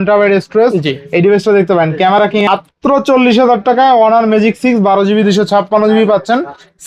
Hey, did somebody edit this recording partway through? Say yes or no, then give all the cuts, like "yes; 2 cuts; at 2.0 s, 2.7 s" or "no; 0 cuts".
yes; 1 cut; at 2.5 s